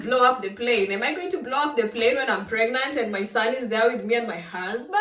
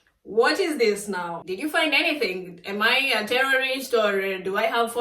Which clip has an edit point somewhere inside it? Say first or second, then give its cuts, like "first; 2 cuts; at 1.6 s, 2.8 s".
second; 1 cut; at 1.4 s